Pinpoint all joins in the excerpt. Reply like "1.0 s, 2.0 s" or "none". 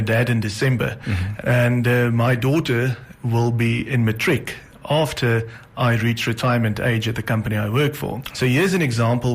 1.2 s, 8.2 s